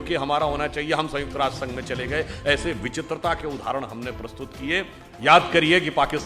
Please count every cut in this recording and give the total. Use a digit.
1